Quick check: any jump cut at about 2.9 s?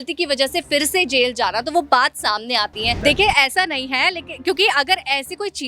yes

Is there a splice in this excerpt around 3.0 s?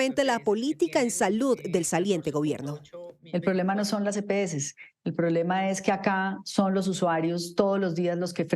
yes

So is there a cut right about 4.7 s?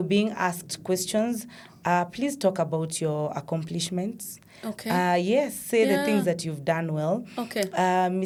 no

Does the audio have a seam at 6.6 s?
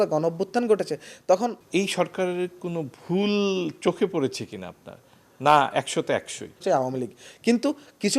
yes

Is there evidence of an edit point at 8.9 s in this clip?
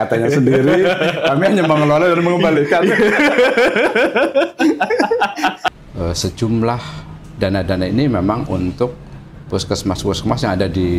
no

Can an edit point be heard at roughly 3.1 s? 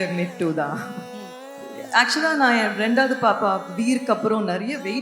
no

